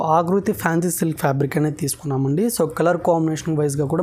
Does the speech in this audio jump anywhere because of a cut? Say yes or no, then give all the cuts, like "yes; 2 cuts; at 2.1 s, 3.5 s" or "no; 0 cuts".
no; 0 cuts